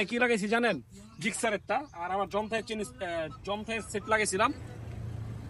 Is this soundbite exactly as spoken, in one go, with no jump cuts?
yes; 0 cuts

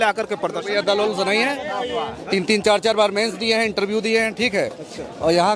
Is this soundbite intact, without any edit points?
yes; 0 cuts

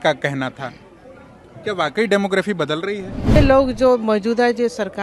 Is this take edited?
yes; 1 cut; at 3.4 s

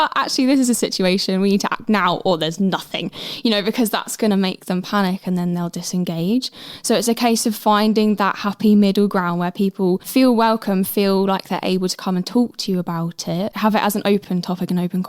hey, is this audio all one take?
no; 3 cuts; at 10.0 s, 13.5 s, 14.3 s

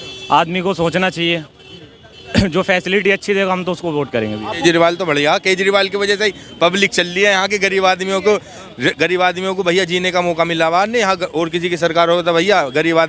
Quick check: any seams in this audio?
yes; 1 cut; at 4.6 s

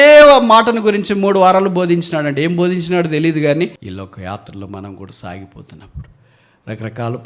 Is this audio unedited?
no; 1 cut; at 3.9 s

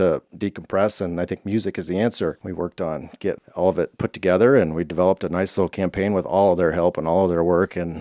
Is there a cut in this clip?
yes; 1 cut; at 2.4 s

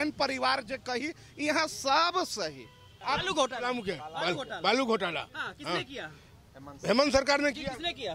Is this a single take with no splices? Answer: no; 1 cut; at 2.9 s

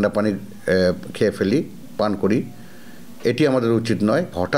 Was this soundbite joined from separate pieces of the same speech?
no; 0 cuts

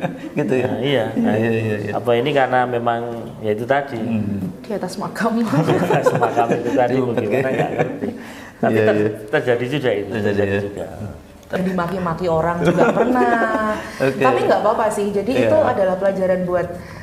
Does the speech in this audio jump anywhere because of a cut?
yes; 1 cut; at 11.6 s

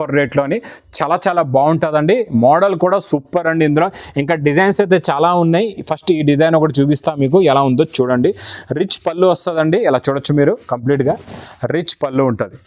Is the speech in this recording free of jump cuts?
yes; 0 cuts

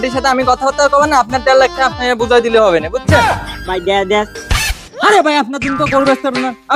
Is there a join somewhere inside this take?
yes; 1 cut; at 3.4 s

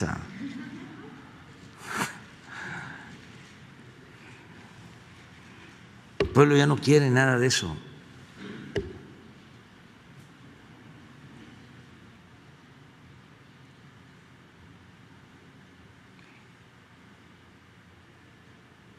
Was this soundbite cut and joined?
yes; 1 cut; at 12.2 s

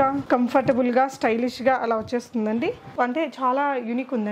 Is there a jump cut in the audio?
yes; 1 cut; at 2.9 s

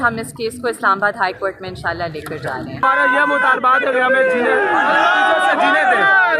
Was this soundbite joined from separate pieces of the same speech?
yes; 1 cut; at 2.8 s

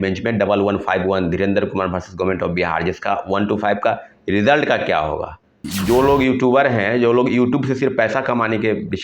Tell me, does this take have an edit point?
yes; 1 cut; at 5.7 s

